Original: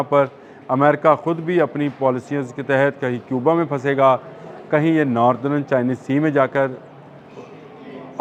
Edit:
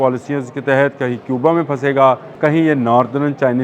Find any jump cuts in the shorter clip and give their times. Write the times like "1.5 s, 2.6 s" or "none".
2.3 s